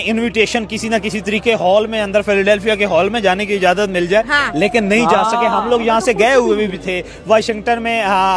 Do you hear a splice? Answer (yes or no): no